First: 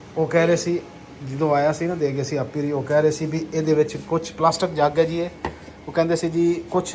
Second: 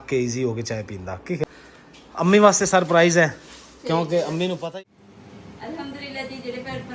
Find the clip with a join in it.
second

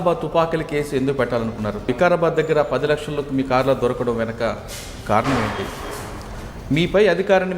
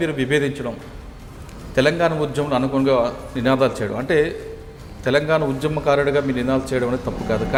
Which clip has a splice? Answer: first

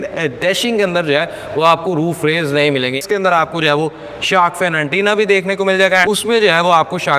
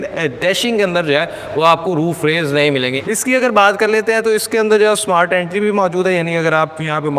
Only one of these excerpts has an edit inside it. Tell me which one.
first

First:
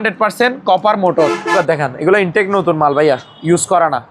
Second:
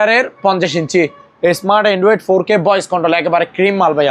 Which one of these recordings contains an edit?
first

